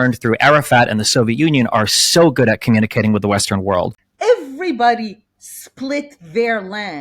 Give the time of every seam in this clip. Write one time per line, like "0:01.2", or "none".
0:04.0